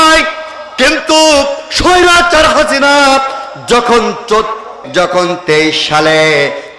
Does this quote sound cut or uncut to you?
cut